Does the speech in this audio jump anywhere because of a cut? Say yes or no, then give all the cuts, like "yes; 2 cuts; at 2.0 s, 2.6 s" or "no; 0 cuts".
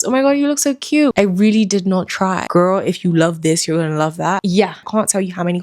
yes; 3 cuts; at 1.1 s, 2.5 s, 4.7 s